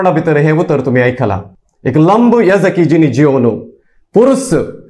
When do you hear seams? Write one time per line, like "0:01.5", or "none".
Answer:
0:01.5